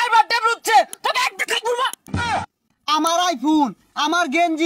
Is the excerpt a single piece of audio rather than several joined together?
no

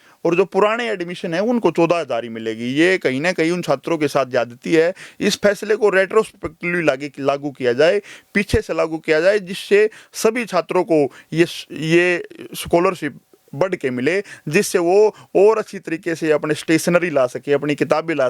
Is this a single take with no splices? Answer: yes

